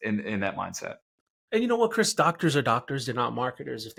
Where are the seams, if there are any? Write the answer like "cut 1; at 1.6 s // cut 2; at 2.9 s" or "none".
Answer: none